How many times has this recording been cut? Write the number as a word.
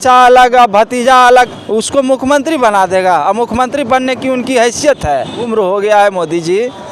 two